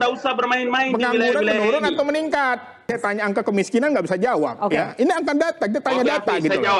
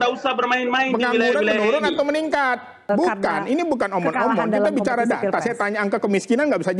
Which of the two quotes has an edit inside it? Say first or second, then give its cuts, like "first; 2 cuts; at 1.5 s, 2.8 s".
first; 1 cut; at 2.9 s